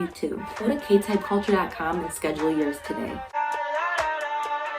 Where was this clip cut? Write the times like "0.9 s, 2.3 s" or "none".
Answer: 3.2 s

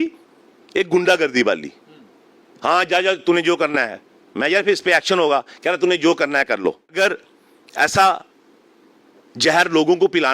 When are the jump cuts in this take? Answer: 6.9 s

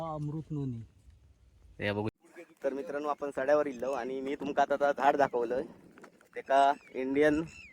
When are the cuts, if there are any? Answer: 2.1 s

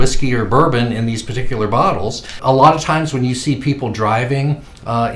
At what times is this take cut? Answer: 2.3 s

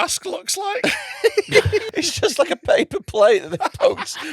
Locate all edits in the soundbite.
1.8 s

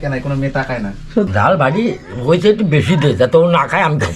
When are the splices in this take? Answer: 1.3 s

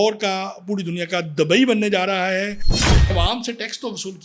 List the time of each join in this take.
2.9 s

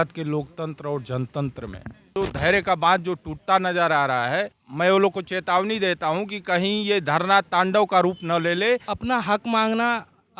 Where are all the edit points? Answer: 2.1 s, 4.6 s, 8.9 s

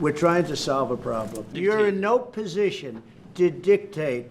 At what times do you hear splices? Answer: 1.4 s

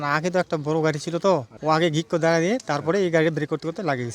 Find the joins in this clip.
1.5 s

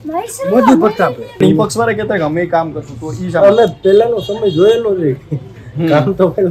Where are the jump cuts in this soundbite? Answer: 1.4 s

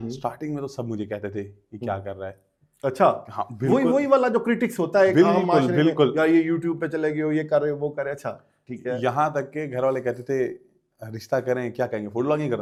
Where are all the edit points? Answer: none

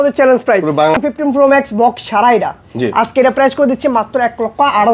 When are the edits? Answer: 1.0 s

